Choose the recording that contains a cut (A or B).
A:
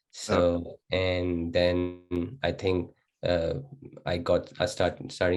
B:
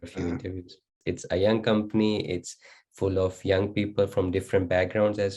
B